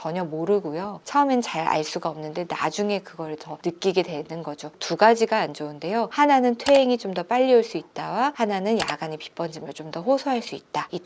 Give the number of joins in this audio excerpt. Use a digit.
2